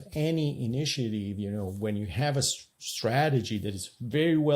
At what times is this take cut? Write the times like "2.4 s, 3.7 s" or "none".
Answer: none